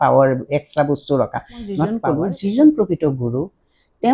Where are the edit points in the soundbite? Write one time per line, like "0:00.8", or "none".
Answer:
0:01.9